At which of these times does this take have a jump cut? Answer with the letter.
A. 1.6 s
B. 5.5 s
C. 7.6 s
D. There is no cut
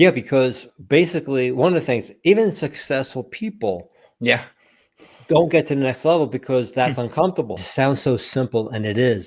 C